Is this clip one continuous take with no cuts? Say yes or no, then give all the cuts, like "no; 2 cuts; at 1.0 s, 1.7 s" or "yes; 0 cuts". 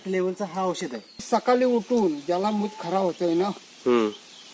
no; 1 cut; at 1.2 s